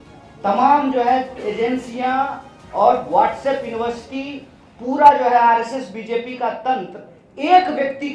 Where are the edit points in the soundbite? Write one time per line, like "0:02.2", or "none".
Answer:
none

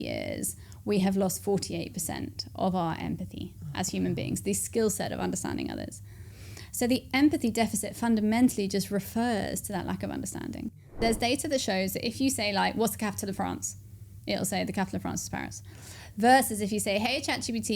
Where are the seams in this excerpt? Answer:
0:11.0

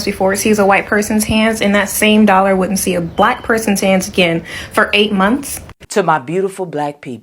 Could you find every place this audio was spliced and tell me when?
0:05.8

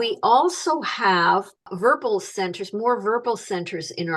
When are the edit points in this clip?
0:01.7

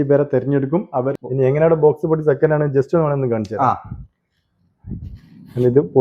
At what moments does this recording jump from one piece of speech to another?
0:01.2

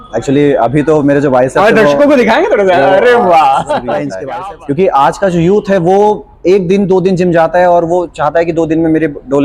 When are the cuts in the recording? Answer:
0:04.1

